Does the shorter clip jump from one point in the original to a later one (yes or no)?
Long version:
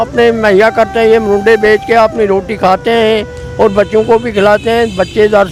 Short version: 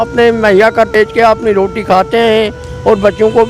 yes